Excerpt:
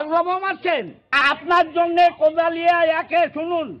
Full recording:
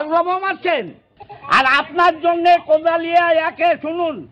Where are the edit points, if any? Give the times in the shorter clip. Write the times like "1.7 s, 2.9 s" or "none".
1.2 s